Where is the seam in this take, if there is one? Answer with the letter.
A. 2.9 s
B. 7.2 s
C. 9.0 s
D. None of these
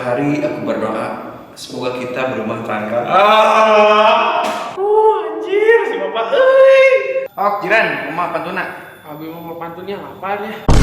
B